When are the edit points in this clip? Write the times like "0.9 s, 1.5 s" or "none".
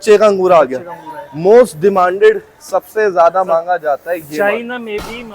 none